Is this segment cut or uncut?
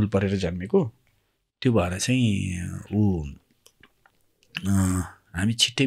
uncut